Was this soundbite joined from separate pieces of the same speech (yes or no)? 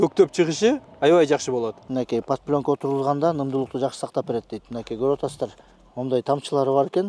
yes